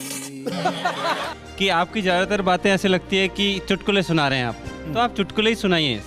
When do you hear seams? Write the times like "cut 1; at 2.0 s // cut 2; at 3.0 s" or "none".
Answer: cut 1; at 1.4 s

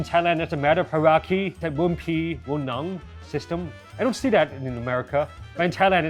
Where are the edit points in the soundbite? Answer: cut 1; at 1.6 s

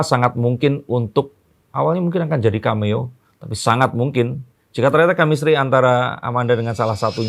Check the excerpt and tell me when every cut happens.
none

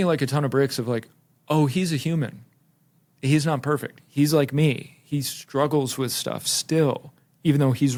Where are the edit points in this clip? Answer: none

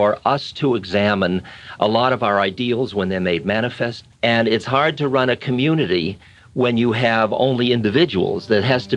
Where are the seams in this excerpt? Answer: cut 1; at 4.0 s

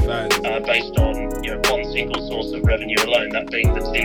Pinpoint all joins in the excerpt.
none

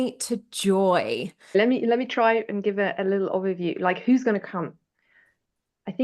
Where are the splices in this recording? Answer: cut 1; at 1.5 s

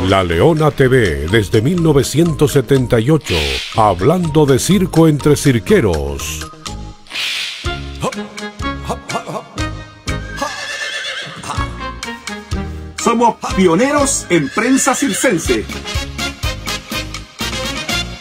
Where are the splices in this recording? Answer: cut 1; at 9.9 s

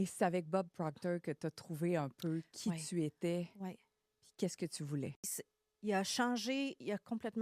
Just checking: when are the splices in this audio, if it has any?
cut 1; at 5.2 s

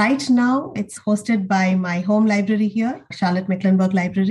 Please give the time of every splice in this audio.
cut 1; at 0.8 s // cut 2; at 3.1 s

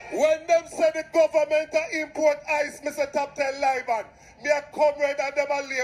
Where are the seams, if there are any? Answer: none

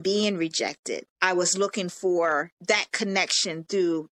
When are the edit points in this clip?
cut 1; at 1.1 s // cut 2; at 2.5 s

